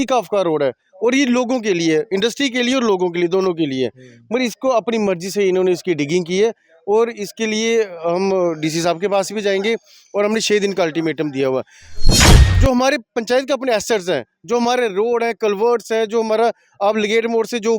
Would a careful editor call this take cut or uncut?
cut